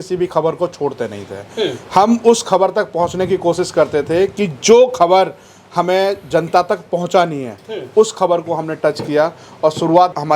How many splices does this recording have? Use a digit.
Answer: 0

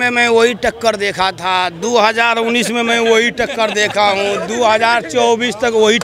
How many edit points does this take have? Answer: 0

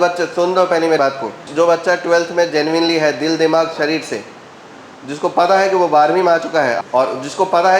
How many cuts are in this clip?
2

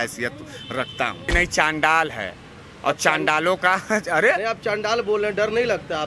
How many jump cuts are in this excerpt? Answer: 1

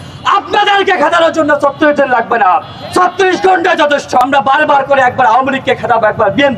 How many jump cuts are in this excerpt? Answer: 1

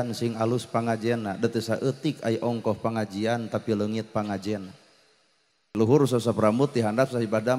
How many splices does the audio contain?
1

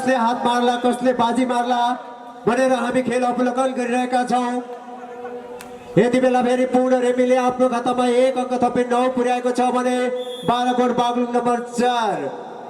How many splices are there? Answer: 0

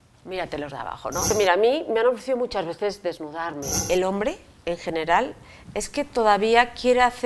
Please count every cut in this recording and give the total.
2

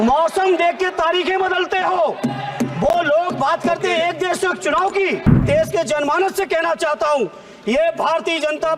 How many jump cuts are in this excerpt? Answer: 1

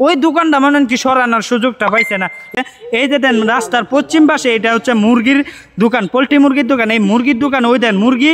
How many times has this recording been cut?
1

